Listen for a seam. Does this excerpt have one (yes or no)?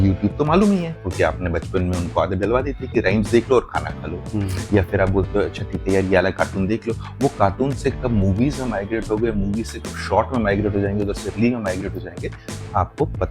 no